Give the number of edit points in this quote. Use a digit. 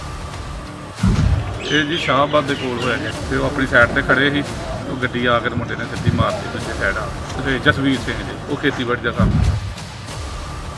1